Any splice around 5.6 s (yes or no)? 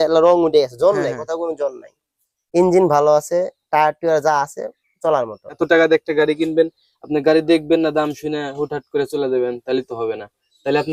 yes